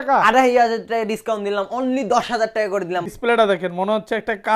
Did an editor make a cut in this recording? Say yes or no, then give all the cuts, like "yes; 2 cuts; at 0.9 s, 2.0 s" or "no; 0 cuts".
yes; 1 cut; at 3.1 s